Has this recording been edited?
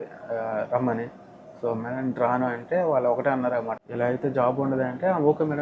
no; 0 cuts

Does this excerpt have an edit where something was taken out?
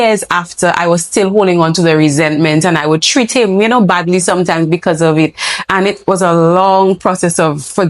no; 0 cuts

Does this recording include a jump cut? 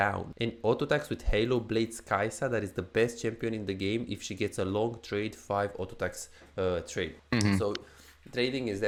no; 0 cuts

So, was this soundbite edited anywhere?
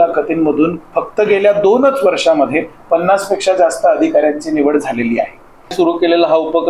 yes; 1 cut; at 5.7 s

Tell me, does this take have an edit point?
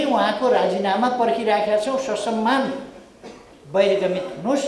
no; 0 cuts

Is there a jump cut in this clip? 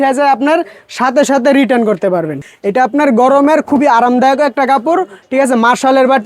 yes; 1 cut; at 2.4 s

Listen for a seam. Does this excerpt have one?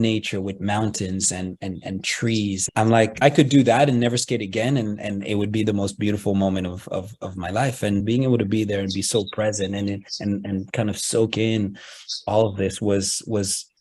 yes; 2 cuts; at 3.1 s, 8.0 s

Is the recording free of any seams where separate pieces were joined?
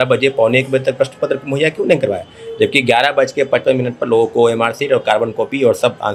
yes; 0 cuts

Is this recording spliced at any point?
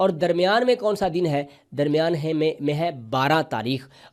no; 0 cuts

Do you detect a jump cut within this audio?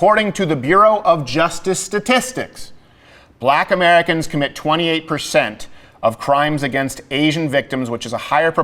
no; 0 cuts

